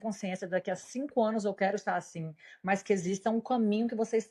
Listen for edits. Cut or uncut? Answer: uncut